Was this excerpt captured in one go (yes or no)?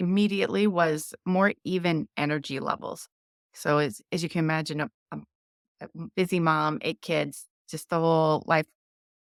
yes